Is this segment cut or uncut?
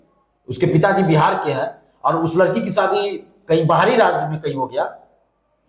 uncut